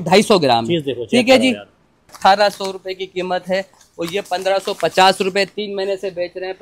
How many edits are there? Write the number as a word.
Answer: one